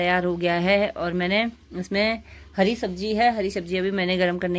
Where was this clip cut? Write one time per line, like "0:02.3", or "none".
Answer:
none